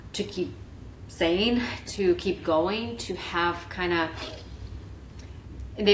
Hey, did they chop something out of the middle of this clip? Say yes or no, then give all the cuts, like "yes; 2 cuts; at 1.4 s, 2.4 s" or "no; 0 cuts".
no; 0 cuts